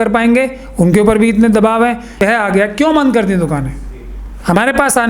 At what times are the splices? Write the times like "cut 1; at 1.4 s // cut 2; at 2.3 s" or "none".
cut 1; at 2.2 s

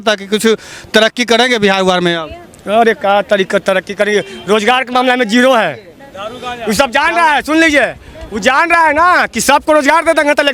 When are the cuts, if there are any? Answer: none

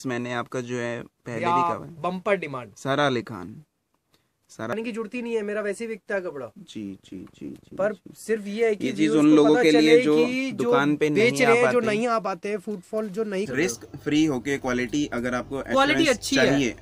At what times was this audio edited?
cut 1; at 4.7 s // cut 2; at 13.5 s

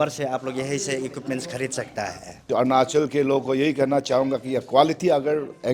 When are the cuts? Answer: cut 1; at 2.5 s

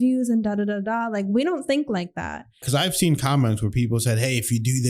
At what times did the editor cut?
cut 1; at 2.6 s

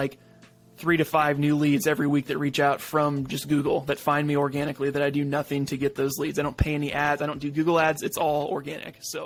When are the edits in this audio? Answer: none

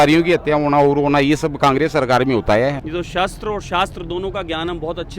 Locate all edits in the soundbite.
cut 1; at 2.8 s

